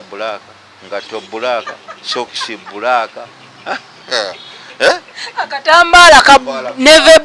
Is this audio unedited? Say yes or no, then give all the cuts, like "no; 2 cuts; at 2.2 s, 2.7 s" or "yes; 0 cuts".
yes; 0 cuts